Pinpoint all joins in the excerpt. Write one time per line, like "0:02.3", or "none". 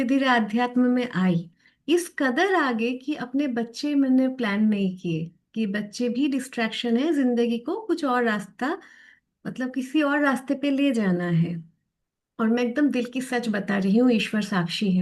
none